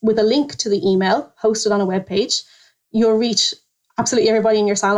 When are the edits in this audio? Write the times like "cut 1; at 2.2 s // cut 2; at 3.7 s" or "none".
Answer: cut 1; at 2.6 s